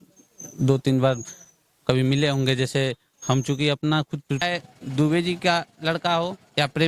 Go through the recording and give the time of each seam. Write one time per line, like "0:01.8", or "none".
0:04.4